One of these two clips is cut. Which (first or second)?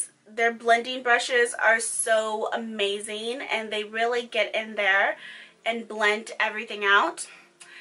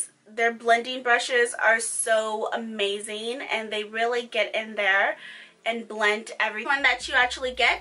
first